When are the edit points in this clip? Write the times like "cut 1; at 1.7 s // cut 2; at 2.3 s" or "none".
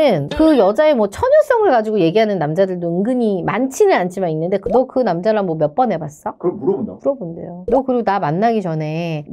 none